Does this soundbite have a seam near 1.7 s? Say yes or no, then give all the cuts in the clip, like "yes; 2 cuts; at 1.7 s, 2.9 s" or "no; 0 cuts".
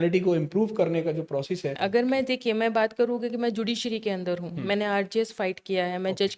yes; 1 cut; at 1.7 s